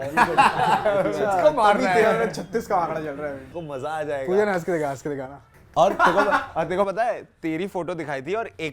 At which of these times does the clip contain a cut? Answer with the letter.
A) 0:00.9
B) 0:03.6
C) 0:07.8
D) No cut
B